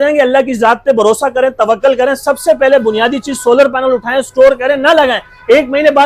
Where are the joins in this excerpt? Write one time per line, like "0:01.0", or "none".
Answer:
none